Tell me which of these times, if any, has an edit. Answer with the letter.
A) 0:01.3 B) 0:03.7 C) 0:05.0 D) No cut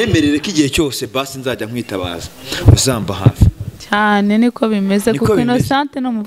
D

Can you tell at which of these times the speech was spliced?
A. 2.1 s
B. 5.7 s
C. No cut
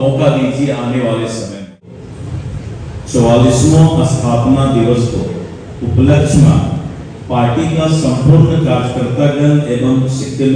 A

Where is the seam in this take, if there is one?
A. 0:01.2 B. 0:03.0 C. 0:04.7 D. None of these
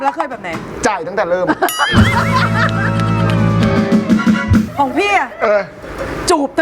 C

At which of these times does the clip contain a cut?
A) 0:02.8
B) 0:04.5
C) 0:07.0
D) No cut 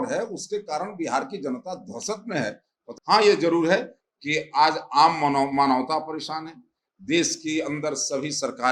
A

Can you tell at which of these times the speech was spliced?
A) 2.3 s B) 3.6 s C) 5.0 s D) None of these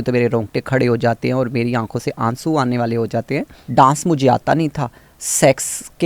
B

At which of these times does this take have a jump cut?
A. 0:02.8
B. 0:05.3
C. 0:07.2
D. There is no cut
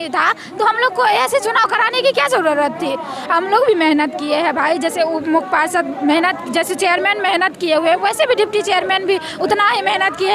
D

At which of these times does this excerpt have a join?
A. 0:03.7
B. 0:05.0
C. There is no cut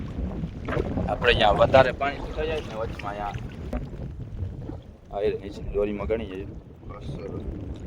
A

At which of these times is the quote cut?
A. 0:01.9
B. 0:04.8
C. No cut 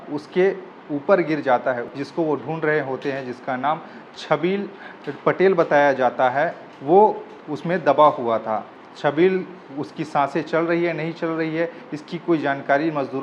A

